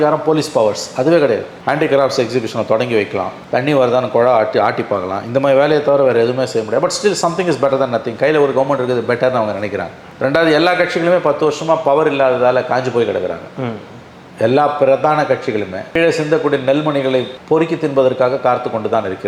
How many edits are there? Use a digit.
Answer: 0